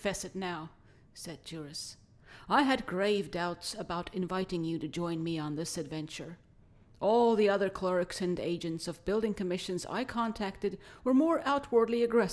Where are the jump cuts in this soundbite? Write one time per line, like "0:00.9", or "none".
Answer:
0:09.2